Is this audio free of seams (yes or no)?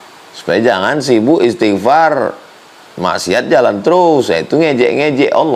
yes